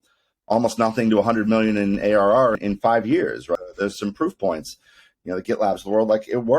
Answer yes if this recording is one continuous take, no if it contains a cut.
no